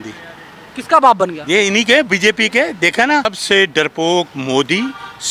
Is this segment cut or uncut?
cut